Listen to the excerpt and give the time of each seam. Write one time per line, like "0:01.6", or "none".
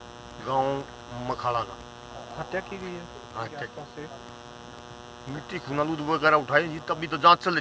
0:03.8